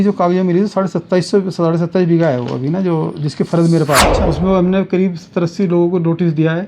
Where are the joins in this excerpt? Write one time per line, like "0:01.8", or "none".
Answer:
0:04.1

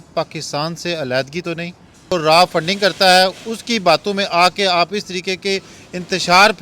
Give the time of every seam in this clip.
0:02.1

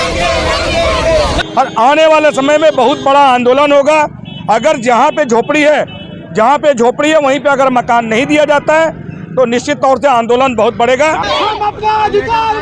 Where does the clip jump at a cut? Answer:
0:01.3
0:11.2

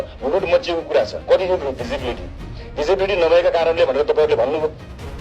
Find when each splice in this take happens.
0:01.2

